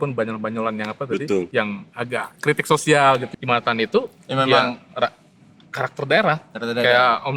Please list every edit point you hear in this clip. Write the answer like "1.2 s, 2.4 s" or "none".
1.5 s, 3.3 s